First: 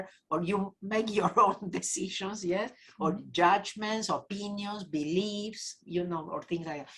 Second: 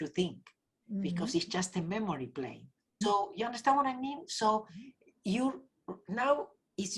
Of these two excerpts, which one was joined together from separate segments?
second; 1 cut; at 3.0 s

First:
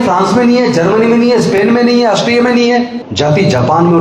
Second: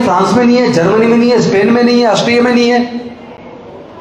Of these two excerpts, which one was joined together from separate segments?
first; 1 cut; at 3.0 s

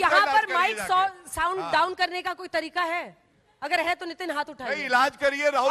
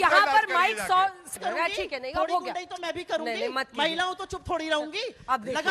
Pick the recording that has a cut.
second; 1 cut; at 1.3 s

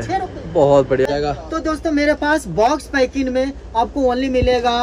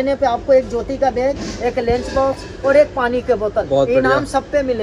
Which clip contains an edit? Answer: first; 1 cut; at 1.1 s

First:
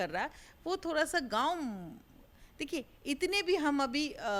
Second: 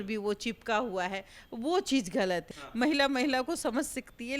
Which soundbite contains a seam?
second; 1 cut; at 2.5 s

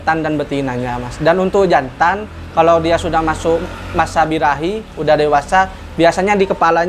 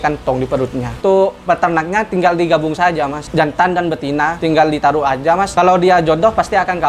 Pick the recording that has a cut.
second; 4 cuts; at 1.0 s, 3.2 s, 4.4 s, 5.5 s

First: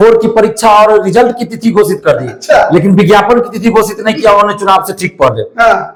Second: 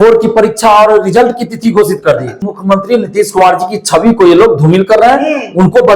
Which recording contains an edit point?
second; 1 cut; at 2.3 s

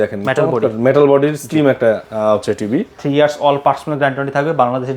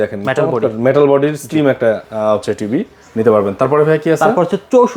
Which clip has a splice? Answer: first; 1 cut; at 3.0 s

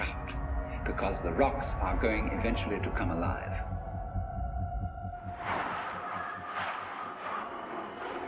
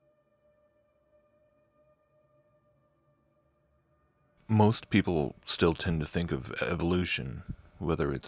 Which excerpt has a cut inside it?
second; 1 cut; at 5.0 s

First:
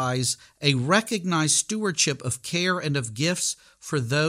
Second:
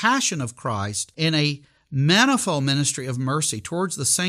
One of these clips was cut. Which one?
second; 1 cut; at 1.0 s

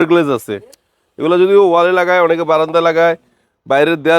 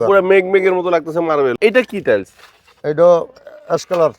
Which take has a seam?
second; 1 cut; at 1.6 s

